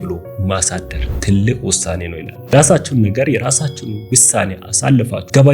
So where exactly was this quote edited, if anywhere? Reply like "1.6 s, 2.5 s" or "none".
2.5 s